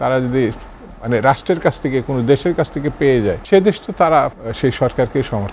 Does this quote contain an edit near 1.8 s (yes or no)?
no